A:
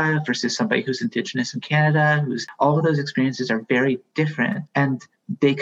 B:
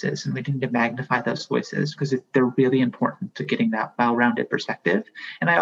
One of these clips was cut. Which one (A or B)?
A